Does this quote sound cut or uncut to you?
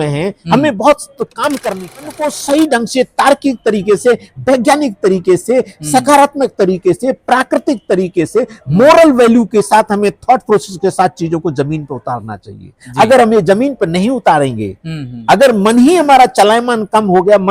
cut